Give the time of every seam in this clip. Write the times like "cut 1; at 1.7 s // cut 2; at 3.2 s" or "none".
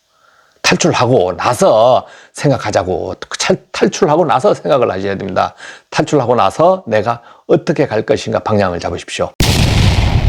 cut 1; at 9.3 s